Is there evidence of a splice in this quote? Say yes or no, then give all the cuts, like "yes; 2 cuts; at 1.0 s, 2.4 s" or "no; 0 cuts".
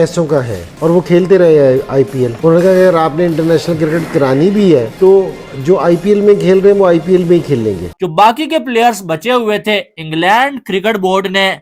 yes; 1 cut; at 7.9 s